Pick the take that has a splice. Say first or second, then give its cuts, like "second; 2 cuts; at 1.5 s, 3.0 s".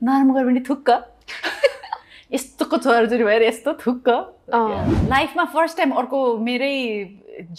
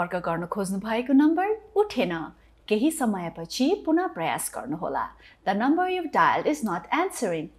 first; 1 cut; at 4.9 s